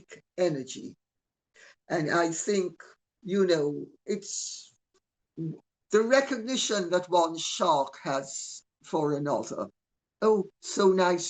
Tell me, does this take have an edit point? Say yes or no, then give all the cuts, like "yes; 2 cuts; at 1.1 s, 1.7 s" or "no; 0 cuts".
no; 0 cuts